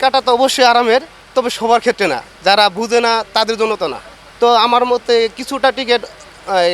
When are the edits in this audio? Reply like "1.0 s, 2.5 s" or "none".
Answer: none